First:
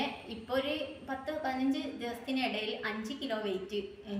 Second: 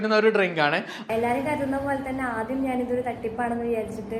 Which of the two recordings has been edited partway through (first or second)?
second